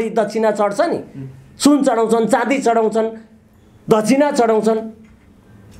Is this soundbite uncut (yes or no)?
yes